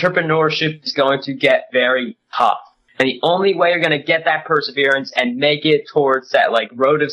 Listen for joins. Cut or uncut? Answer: cut